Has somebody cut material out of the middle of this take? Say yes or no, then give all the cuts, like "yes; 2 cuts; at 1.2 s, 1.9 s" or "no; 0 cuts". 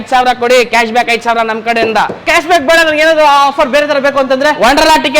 yes; 1 cut; at 2.2 s